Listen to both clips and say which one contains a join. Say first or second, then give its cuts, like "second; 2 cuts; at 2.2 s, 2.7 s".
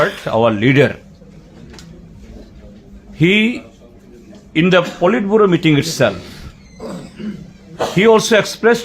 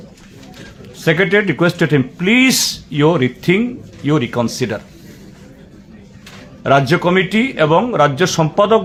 first; 1 cut; at 1.2 s